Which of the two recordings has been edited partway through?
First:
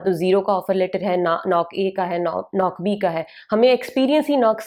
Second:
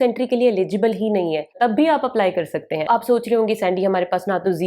second; 2 cuts; at 1.5 s, 2.9 s

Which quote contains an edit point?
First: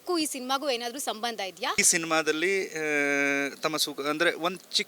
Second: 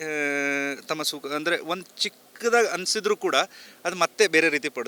first; 1 cut; at 1.8 s

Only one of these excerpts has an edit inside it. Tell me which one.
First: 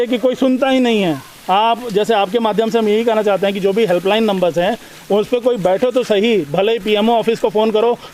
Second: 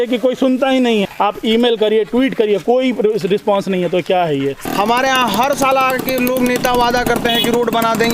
second; 2 cuts; at 1.1 s, 4.6 s

